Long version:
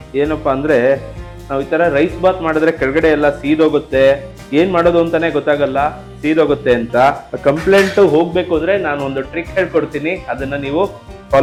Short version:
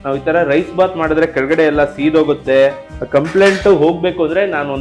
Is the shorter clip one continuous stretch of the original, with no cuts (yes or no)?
no